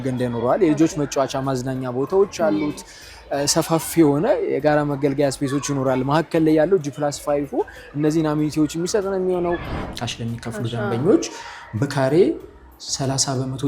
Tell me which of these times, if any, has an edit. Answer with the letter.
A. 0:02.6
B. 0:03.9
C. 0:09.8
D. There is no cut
C